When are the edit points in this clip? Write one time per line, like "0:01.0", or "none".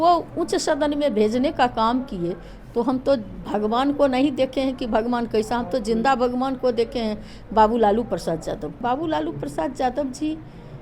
0:08.7